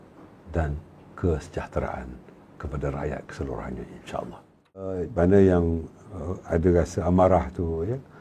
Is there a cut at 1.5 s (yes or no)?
no